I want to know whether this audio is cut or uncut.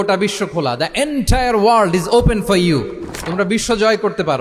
uncut